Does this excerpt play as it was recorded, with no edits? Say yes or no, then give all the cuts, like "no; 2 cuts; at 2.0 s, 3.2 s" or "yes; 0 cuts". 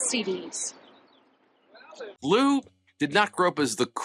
no; 1 cut; at 2.2 s